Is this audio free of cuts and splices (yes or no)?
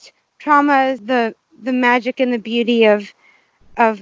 no